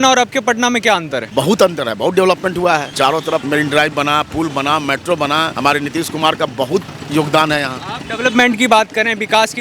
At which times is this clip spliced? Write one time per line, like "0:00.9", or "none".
0:01.2
0:03.3
0:05.5